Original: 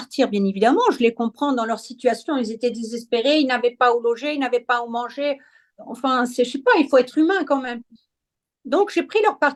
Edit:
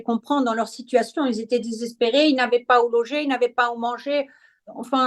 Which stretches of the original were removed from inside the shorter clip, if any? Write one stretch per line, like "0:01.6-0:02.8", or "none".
none